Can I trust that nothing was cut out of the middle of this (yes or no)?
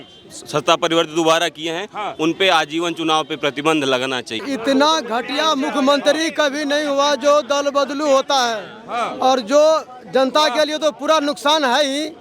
no